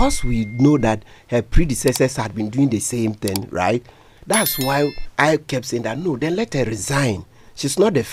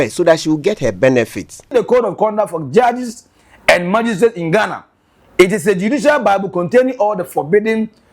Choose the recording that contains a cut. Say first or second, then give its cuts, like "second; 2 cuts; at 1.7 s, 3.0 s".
second; 1 cut; at 1.7 s